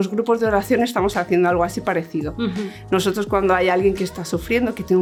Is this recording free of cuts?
yes; 0 cuts

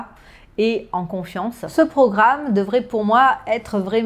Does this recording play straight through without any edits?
no; 1 cut; at 1.6 s

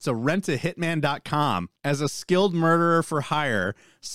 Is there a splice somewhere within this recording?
yes; 1 cut; at 1.7 s

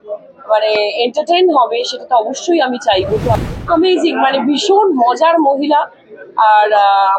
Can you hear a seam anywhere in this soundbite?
yes; 1 cut; at 3.4 s

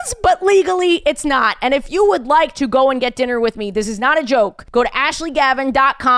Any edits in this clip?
no; 0 cuts

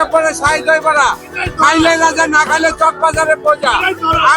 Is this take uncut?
yes; 0 cuts

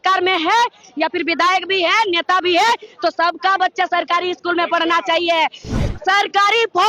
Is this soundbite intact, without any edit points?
no; 1 cut; at 5.8 s

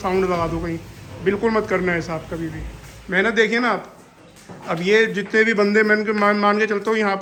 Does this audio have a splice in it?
no; 0 cuts

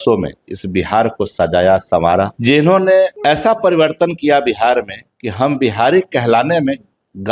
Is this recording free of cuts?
no; 2 cuts; at 2.3 s, 3.2 s

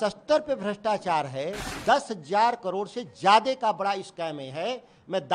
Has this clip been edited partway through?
yes; 1 cut; at 1.6 s

